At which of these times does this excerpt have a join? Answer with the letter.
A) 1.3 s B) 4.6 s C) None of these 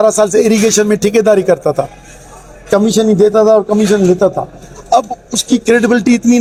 C